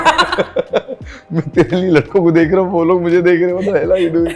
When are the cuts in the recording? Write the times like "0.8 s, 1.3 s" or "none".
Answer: none